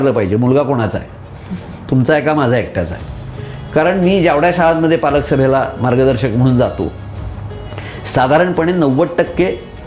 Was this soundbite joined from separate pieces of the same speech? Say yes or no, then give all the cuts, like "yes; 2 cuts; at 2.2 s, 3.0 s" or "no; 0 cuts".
no; 0 cuts